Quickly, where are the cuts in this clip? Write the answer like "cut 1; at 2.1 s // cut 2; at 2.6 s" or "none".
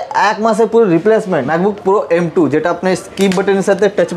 cut 1; at 1.4 s